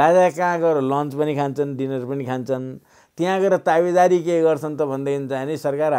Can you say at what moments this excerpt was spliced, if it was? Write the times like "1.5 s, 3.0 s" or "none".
none

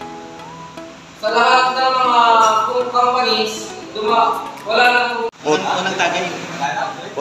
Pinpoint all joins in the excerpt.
5.4 s

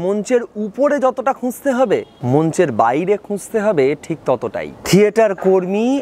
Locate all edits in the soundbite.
2.1 s, 4.7 s

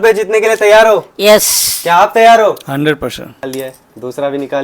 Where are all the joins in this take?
3.3 s

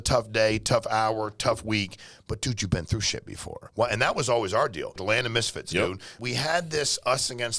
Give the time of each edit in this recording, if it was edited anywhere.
3.7 s, 5.0 s, 6.2 s

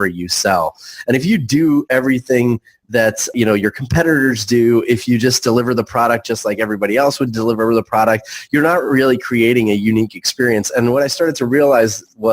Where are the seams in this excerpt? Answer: 3.3 s

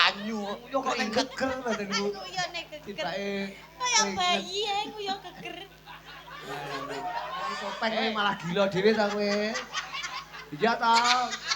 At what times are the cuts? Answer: 7.7 s

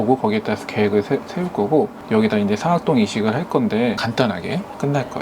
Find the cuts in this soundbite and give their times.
2.0 s

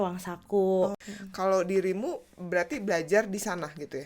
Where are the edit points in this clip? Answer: 1.1 s

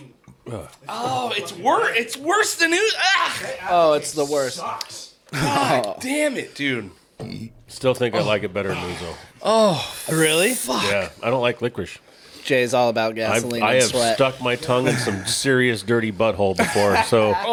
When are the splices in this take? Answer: none

